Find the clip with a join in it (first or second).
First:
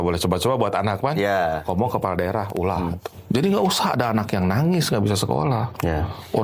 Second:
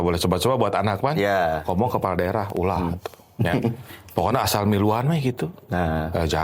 first